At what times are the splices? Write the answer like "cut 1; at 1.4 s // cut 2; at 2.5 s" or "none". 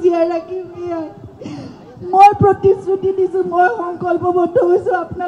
none

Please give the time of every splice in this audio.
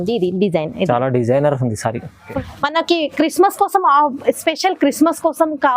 cut 1; at 2.3 s

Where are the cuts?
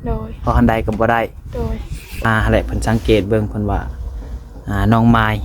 cut 1; at 2.2 s

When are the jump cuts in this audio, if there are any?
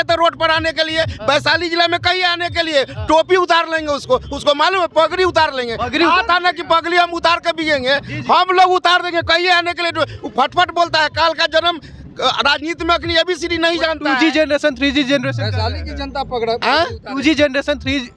none

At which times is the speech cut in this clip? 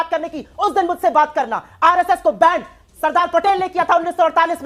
none

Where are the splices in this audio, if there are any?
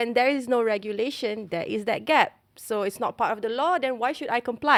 none

